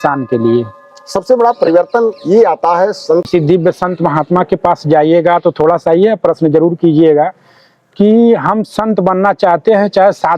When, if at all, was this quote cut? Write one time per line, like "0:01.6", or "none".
0:03.3